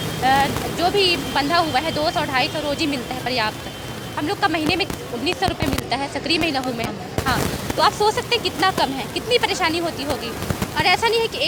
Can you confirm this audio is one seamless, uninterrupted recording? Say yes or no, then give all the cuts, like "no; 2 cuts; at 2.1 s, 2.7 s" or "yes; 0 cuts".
yes; 0 cuts